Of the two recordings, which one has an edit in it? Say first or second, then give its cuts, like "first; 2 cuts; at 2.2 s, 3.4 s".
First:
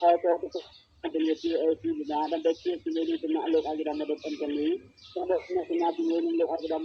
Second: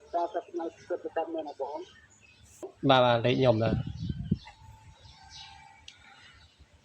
second; 1 cut; at 2.7 s